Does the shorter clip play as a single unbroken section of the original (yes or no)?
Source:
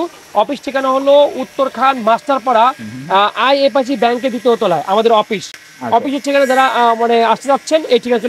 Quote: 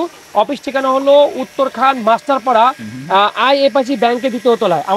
yes